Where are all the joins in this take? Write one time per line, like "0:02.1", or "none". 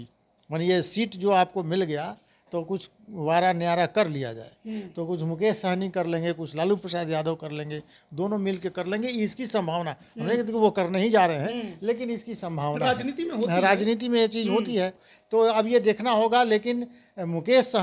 0:15.1

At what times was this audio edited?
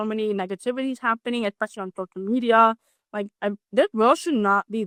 none

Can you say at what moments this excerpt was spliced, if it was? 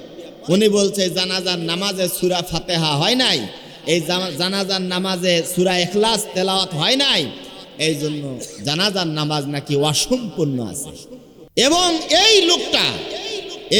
none

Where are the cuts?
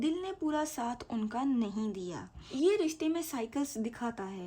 0:02.4

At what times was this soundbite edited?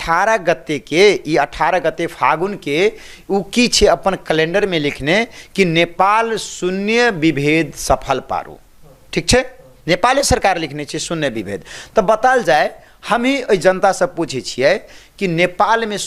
none

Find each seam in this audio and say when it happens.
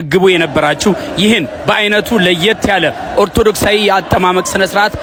none

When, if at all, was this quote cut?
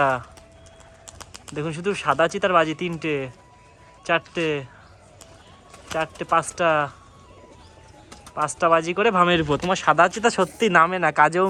none

